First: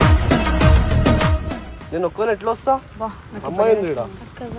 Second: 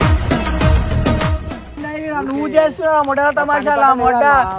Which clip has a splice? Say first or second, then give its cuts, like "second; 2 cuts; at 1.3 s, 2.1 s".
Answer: second; 1 cut; at 1.8 s